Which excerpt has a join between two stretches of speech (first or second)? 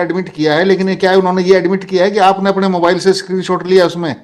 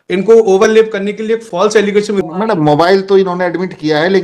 second